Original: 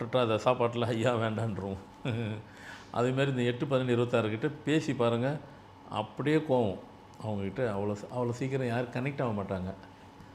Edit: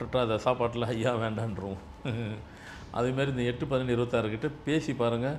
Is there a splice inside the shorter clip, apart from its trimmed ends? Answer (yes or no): no